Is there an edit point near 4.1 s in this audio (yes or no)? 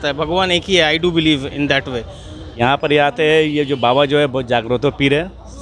no